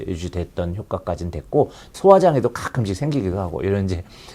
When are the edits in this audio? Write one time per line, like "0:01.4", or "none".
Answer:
0:01.9